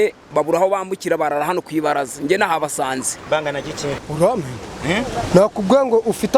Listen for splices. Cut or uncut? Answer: cut